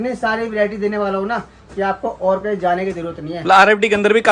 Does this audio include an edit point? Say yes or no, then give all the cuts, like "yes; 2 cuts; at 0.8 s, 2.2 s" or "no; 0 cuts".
no; 0 cuts